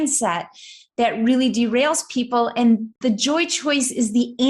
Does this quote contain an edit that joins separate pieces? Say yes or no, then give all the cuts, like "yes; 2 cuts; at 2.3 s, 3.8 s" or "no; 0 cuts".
yes; 1 cut; at 2.9 s